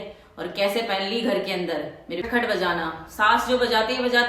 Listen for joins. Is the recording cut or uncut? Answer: cut